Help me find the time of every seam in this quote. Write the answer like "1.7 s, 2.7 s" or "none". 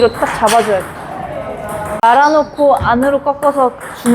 2.0 s